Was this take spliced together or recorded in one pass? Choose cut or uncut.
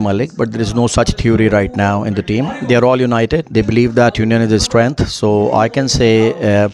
uncut